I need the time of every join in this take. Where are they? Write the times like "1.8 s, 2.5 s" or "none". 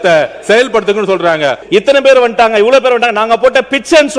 1.6 s